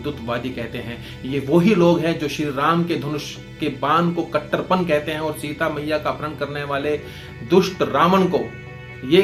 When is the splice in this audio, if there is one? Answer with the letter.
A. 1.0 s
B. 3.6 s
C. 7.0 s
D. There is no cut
D